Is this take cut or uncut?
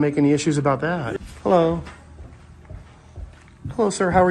cut